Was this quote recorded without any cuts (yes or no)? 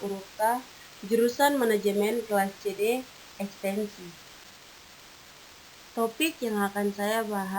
no